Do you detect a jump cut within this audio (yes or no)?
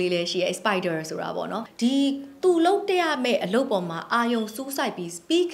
yes